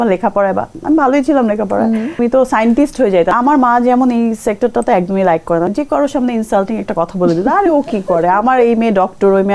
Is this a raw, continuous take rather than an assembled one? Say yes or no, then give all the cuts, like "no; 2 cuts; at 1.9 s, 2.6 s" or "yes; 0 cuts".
no; 3 cuts; at 2.2 s, 3.3 s, 5.7 s